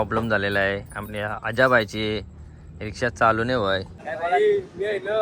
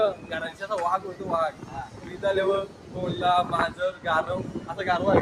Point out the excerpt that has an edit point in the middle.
first; 1 cut; at 4.0 s

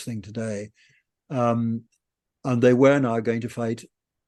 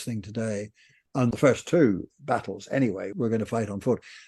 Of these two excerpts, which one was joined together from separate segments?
second; 2 cuts; at 1.3 s, 3.1 s

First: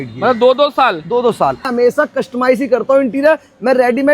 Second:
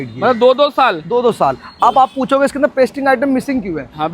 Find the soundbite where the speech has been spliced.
first; 1 cut; at 1.7 s

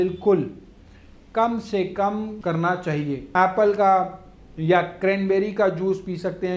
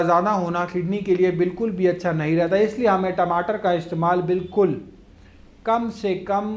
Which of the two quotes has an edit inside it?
first; 1 cut; at 3.3 s

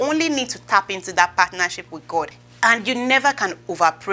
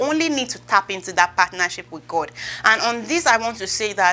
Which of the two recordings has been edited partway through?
first; 1 cut; at 2.4 s

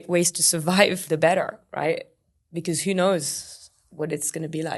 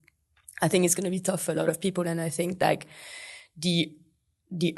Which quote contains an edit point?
first; 2 cuts; at 1.0 s, 2.2 s

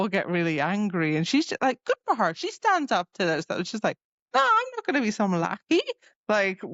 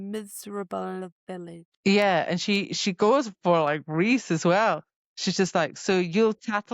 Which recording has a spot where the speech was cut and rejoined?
second; 1 cut; at 1.6 s

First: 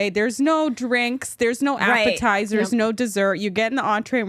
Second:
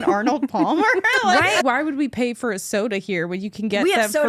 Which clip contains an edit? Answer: second; 1 cut; at 1.6 s

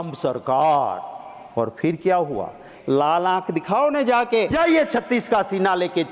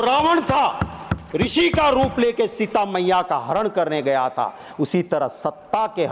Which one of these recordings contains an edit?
first; 2 cuts; at 2.7 s, 4.5 s

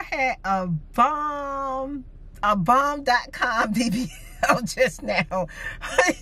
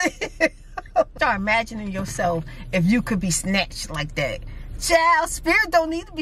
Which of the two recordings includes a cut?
second; 1 cut; at 1.1 s

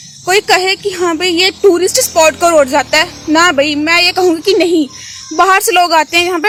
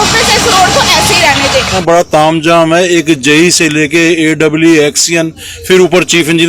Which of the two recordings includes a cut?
second; 1 cut; at 1.8 s

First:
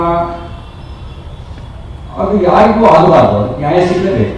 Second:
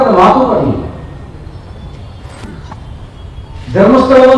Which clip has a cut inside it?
second; 1 cut; at 2.4 s

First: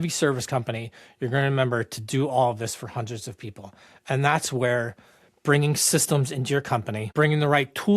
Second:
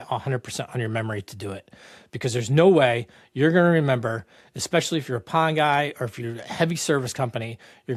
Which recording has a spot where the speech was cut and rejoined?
first; 1 cut; at 7.1 s

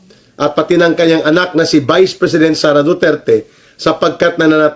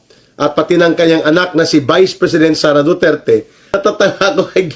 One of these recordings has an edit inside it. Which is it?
second; 1 cut; at 3.8 s

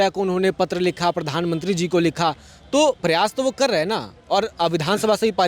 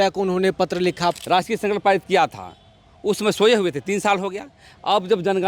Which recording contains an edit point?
second; 1 cut; at 1.2 s

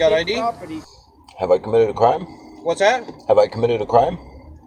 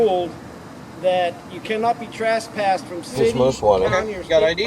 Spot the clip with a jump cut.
second; 1 cut; at 3.3 s

